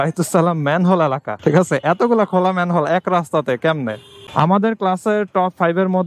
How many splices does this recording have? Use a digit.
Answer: 2